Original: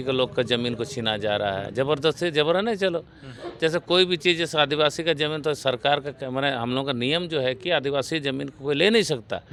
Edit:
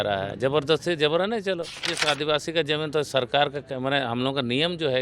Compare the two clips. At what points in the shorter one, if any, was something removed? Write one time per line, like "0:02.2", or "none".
0:01.9